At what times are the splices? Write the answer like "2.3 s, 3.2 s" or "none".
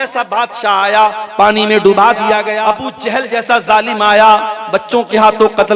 2.5 s